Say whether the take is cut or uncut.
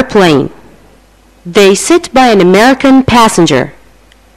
uncut